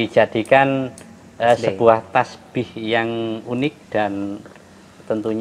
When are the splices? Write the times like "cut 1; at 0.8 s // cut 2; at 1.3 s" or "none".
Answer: none